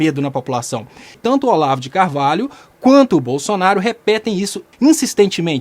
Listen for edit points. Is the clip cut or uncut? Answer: cut